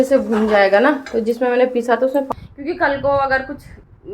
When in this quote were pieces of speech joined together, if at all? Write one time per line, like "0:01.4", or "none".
0:02.3

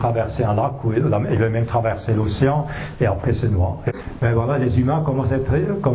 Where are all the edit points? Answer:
0:03.8

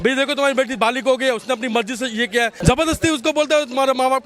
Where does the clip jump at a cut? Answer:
0:02.5

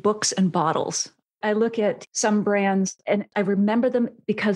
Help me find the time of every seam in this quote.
0:01.2
0:03.3

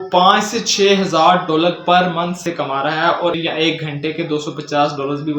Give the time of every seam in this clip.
0:02.4
0:03.4

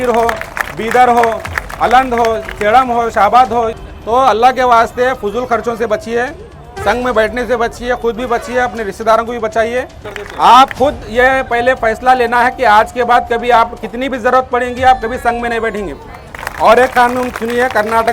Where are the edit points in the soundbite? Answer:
0:03.8
0:09.9
0:16.3

